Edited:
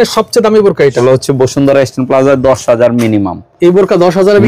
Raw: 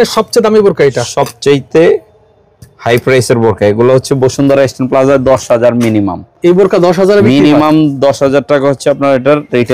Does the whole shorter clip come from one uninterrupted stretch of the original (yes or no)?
no